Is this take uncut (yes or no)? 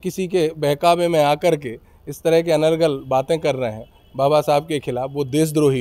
yes